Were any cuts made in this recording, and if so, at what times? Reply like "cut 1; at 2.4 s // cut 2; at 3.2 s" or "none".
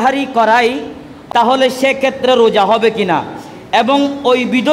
cut 1; at 1.1 s